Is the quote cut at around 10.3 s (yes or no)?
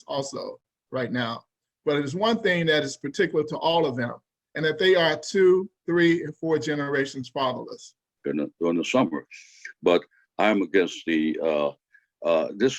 no